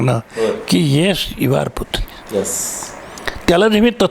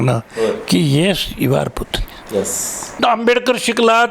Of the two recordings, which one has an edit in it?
second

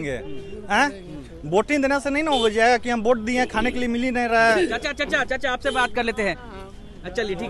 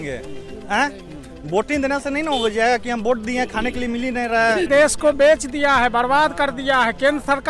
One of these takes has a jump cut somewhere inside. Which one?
second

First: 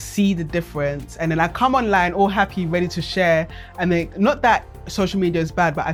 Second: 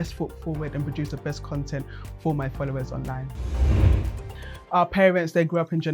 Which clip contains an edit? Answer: second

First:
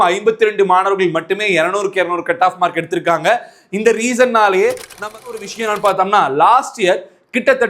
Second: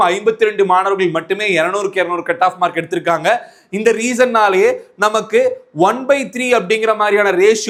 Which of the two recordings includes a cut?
first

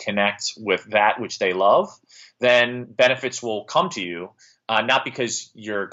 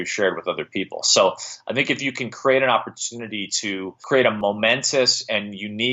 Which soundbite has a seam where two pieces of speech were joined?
second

